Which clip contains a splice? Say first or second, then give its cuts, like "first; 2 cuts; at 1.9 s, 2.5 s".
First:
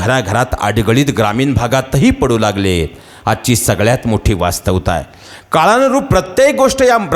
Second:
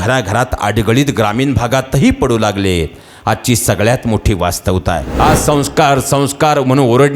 second; 1 cut; at 5.1 s